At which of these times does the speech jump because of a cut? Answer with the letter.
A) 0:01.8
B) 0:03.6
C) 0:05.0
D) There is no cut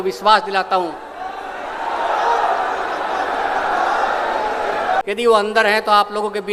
C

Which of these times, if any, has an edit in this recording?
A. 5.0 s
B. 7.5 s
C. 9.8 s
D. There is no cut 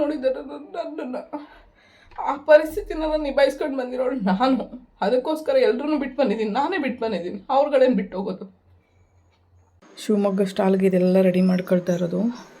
C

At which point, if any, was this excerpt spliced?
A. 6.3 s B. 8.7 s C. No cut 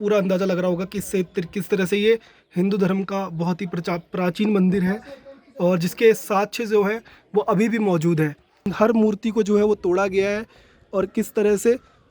B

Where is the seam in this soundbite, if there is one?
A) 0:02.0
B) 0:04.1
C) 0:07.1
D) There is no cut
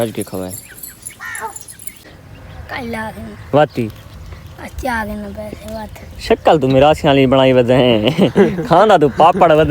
A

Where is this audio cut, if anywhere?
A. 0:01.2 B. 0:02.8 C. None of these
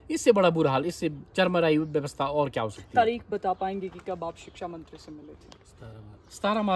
C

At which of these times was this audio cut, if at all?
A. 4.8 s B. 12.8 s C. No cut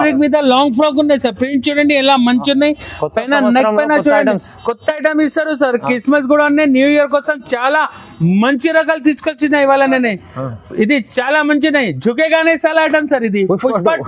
C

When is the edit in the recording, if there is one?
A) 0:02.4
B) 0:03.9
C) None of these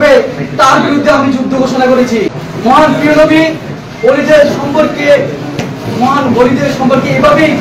A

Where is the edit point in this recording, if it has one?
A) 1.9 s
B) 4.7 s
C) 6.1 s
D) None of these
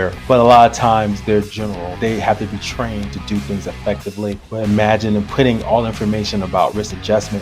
A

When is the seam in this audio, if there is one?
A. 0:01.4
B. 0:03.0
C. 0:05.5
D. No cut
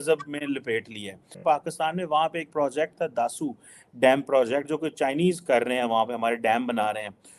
D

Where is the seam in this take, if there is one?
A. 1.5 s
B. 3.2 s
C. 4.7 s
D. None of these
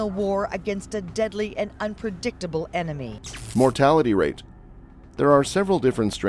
D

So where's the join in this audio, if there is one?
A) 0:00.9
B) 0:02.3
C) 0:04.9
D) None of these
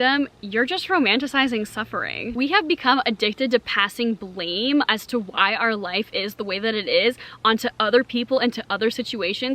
B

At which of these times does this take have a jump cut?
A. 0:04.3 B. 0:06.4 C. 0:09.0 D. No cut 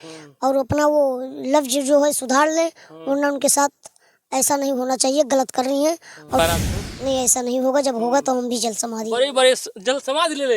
B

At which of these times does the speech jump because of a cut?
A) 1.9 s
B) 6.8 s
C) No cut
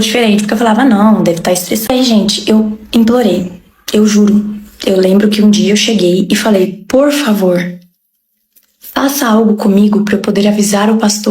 A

